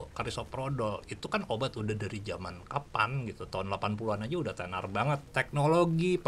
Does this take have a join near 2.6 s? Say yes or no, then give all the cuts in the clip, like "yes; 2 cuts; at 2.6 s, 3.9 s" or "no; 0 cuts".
no; 1 cut; at 5.3 s